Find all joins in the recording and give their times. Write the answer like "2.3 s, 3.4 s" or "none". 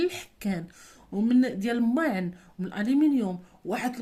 none